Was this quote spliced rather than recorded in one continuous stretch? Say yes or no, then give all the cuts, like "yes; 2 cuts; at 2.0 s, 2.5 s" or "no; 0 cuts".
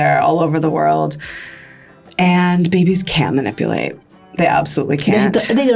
no; 0 cuts